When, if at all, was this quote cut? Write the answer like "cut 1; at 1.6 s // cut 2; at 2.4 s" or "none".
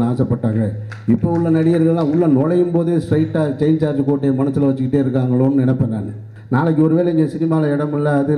cut 1; at 6.3 s

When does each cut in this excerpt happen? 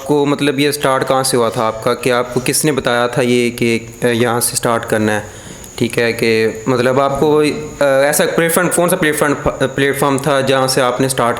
none

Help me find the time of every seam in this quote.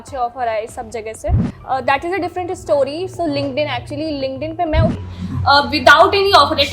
cut 1; at 1.5 s // cut 2; at 4.9 s

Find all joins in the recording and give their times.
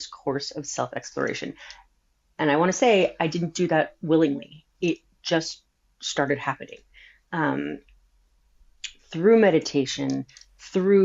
none

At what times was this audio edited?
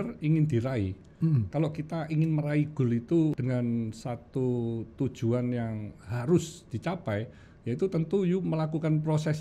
cut 1; at 3.4 s

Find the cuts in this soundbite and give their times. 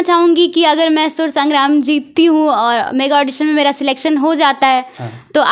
none

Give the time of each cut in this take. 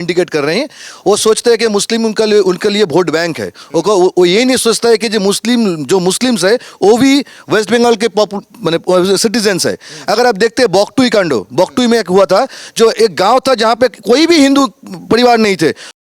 none

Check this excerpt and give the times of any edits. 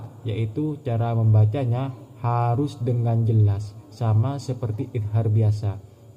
none

